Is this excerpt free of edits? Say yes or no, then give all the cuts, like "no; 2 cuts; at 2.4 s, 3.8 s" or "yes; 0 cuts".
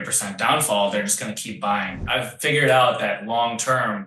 no; 1 cut; at 2.0 s